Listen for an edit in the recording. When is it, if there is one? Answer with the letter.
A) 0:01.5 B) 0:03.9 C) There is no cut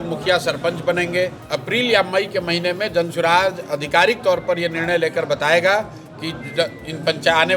A